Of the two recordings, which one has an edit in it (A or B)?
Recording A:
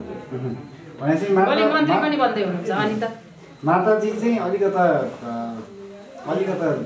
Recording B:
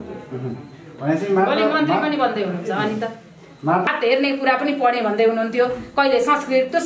B